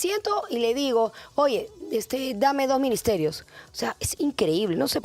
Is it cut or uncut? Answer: uncut